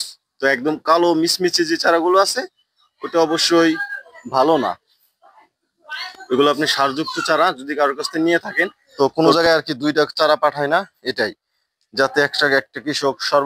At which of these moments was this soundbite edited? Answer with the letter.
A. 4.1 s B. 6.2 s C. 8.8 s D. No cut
C